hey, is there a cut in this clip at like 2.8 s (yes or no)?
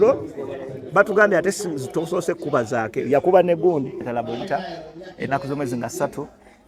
no